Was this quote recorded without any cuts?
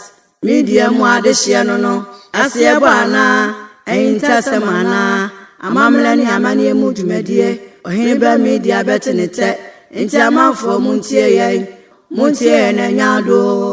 yes; 0 cuts

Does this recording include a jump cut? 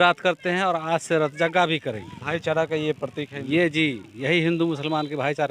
no; 0 cuts

